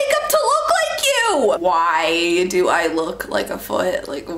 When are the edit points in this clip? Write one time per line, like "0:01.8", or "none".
0:01.6